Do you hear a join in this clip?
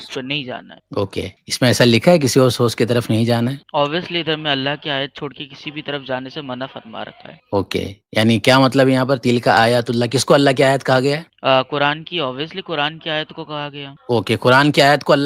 no; 0 cuts

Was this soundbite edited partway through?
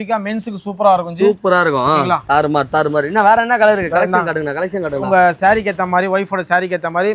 no; 0 cuts

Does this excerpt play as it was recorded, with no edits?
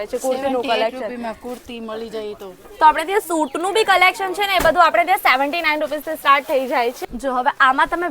no; 2 cuts; at 2.7 s, 7.0 s

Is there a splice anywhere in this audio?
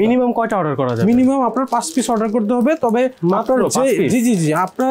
no; 0 cuts

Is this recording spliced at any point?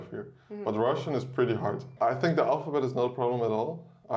yes; 1 cut; at 1.9 s

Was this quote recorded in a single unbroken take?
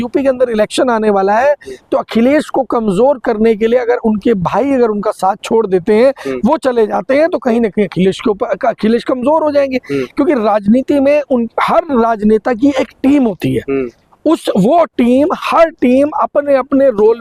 yes; 0 cuts

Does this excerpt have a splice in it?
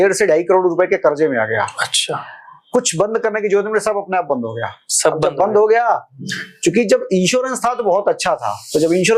no; 0 cuts

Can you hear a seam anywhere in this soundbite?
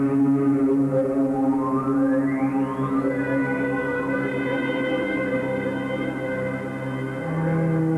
no; 0 cuts

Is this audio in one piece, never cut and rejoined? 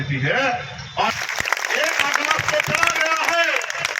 no; 1 cut; at 1.1 s

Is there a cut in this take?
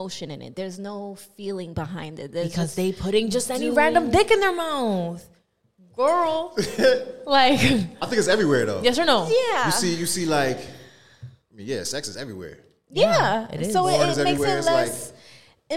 no; 0 cuts

